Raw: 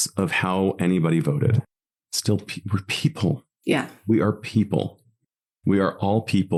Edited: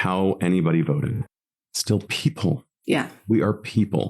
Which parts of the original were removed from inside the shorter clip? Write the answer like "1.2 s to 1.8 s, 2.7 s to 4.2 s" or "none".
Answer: 2.5 s to 2.9 s